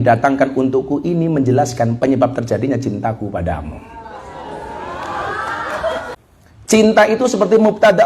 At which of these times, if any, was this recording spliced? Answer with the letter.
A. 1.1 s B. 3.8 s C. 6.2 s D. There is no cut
C